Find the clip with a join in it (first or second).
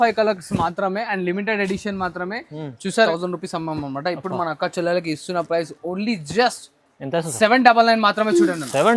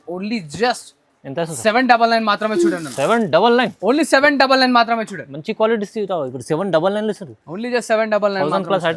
first